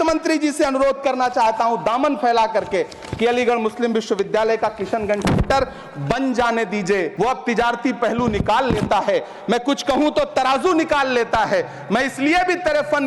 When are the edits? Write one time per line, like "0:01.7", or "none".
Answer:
0:07.1